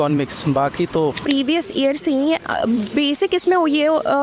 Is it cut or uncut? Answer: cut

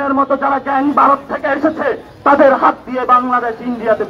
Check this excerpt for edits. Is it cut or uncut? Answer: uncut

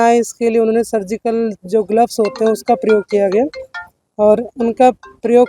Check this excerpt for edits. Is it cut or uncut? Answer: uncut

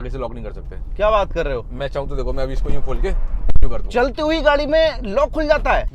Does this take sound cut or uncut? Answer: uncut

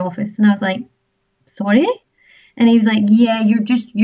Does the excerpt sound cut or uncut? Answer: uncut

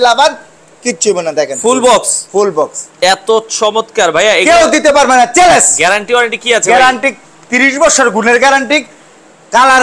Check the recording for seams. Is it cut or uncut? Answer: cut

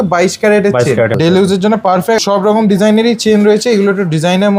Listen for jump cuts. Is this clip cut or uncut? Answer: cut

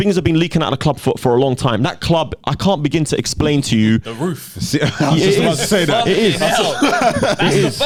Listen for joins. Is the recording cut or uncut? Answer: uncut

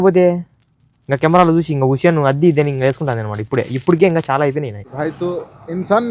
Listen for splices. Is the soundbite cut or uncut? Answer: cut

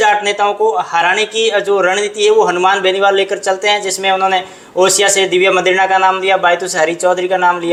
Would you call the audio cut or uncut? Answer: uncut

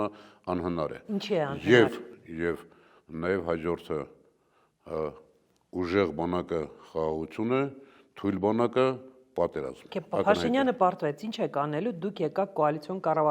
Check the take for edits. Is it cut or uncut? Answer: uncut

